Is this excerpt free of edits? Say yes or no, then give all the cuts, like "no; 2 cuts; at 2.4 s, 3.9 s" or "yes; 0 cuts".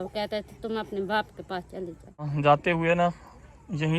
no; 1 cut; at 2.3 s